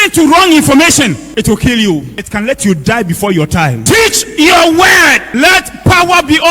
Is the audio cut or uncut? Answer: cut